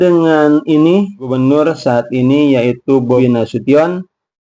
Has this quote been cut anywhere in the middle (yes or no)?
yes